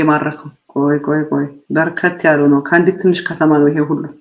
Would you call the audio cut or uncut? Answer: uncut